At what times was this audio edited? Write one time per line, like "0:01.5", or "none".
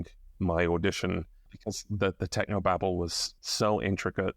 0:01.3
0:03.2